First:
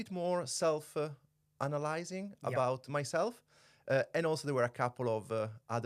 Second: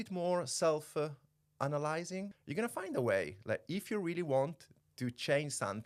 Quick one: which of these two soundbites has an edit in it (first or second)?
second